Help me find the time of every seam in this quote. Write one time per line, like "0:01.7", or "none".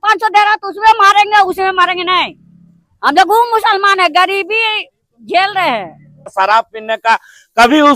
0:06.3

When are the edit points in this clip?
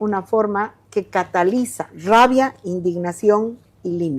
0:01.9

